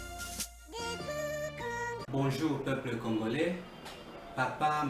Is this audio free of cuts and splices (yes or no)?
no